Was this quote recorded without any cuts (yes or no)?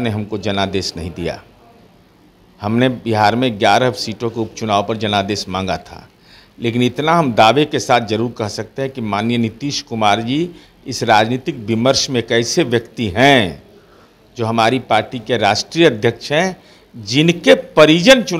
yes